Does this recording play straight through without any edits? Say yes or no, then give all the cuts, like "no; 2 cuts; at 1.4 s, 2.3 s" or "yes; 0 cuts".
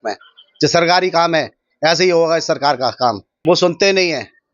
no; 1 cut; at 3.3 s